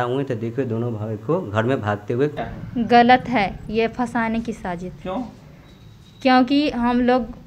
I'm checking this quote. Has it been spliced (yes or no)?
yes